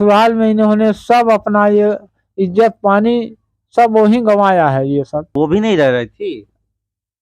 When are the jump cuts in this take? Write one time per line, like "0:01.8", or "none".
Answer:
0:05.3